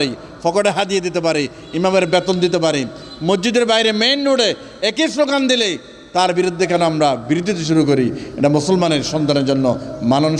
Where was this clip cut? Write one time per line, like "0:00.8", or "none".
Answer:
none